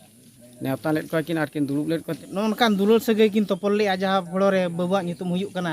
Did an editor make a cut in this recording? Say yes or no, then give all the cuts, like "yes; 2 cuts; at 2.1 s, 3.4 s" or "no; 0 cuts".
yes; 1 cut; at 2.2 s